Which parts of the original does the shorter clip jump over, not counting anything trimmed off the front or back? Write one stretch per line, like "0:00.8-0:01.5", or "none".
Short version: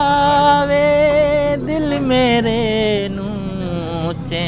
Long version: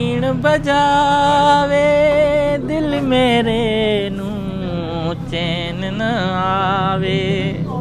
none